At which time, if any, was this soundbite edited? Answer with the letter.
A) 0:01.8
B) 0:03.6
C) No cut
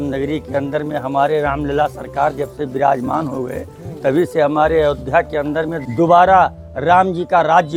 C